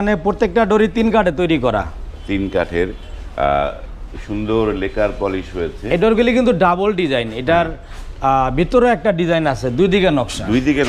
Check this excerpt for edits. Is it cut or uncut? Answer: uncut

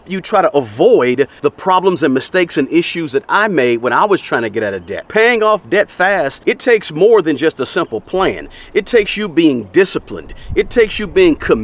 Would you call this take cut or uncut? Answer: cut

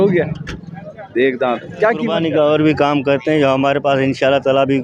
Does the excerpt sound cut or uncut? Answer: cut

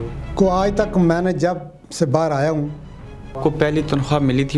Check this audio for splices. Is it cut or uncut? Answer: cut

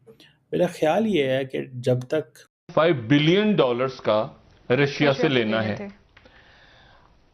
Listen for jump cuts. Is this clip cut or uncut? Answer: cut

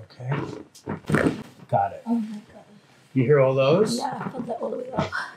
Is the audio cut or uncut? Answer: uncut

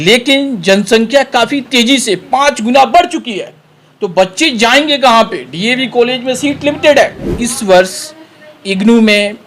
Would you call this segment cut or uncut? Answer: cut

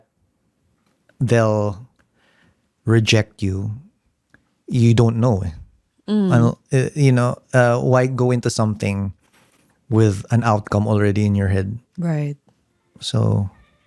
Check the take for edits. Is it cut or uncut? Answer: uncut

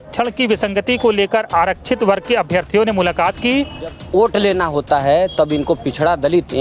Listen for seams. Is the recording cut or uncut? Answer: cut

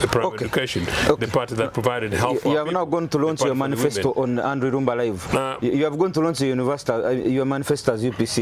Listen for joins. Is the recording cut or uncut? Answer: uncut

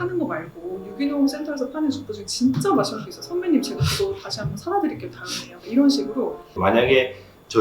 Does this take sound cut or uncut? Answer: cut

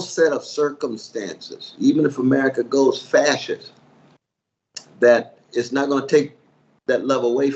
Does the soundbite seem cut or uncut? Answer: uncut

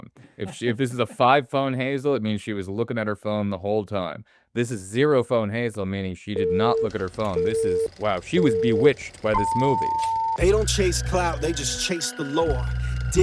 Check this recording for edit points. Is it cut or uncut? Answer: cut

